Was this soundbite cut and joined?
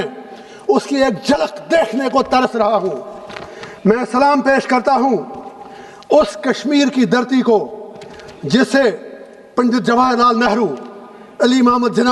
no; 0 cuts

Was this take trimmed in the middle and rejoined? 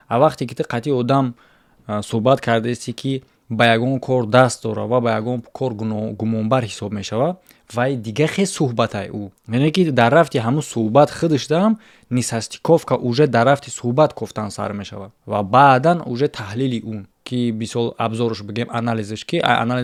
no; 0 cuts

